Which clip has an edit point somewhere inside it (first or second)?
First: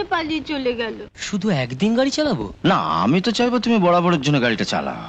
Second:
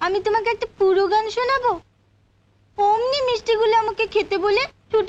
first